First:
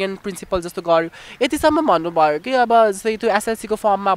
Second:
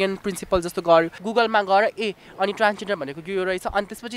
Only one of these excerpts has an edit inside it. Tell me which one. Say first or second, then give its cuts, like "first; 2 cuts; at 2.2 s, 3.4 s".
second; 1 cut; at 1.2 s